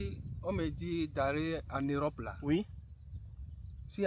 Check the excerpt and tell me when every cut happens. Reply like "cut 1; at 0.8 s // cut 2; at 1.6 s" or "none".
none